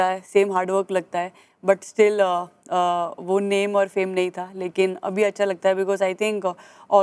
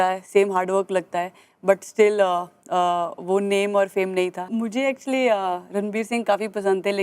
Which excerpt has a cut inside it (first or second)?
second